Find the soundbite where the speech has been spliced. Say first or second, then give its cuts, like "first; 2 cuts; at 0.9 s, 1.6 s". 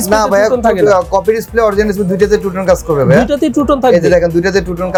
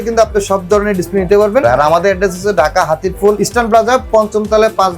second; 2 cuts; at 1.6 s, 3.4 s